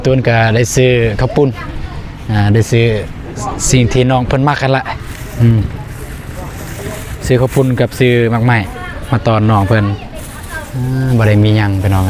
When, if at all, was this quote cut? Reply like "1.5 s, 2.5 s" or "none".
none